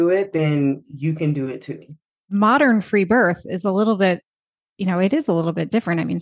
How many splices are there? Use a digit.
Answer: 1